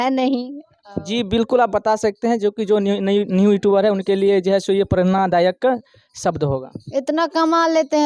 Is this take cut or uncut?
uncut